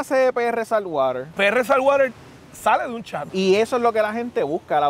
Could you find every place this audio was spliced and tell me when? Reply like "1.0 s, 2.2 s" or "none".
1.3 s, 3.2 s